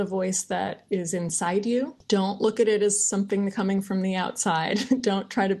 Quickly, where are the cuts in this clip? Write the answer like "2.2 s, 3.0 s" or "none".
2.0 s